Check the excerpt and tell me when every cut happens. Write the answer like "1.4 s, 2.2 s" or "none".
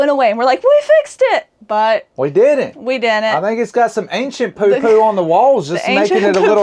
none